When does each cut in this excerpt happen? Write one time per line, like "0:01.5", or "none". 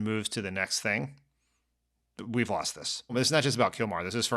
0:03.1